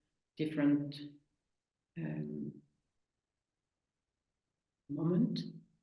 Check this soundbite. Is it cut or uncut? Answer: uncut